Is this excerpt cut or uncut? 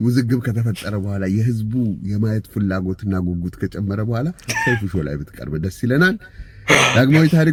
uncut